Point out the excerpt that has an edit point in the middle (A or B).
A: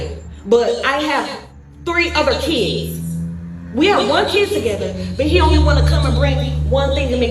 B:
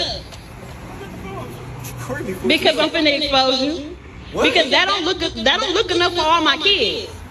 A